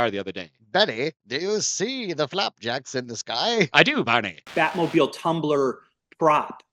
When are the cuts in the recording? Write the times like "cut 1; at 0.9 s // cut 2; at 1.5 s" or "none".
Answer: cut 1; at 4.5 s

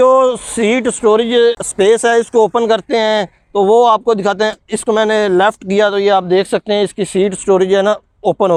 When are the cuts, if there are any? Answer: none

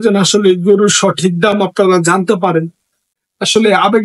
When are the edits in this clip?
cut 1; at 3.0 s

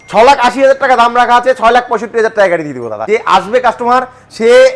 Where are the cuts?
cut 1; at 3.0 s

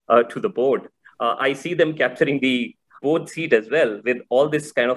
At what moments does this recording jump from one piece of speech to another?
cut 1; at 3.0 s

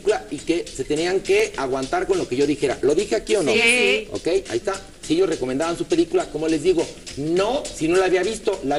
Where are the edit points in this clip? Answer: none

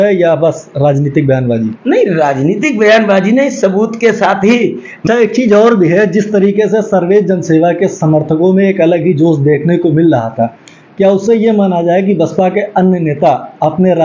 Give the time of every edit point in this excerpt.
cut 1; at 4.9 s

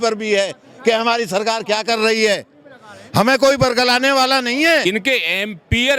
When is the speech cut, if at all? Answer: cut 1; at 4.8 s

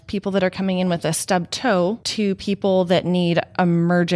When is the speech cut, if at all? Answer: cut 1; at 2.0 s

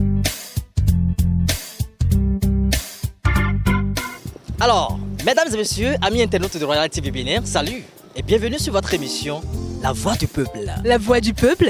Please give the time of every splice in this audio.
cut 1; at 1.2 s

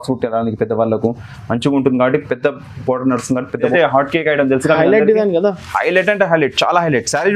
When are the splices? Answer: cut 1; at 3.7 s

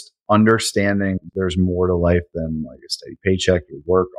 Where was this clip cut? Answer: cut 1; at 1.2 s

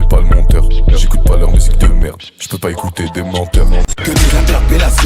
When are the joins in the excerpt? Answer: cut 1; at 3.9 s

